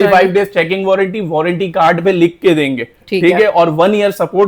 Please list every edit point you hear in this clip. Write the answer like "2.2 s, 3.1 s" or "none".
none